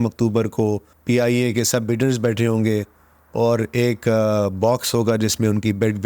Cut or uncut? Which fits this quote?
cut